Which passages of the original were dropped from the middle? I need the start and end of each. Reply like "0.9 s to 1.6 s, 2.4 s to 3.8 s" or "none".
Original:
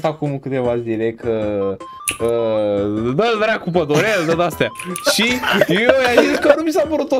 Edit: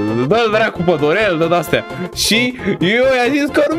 none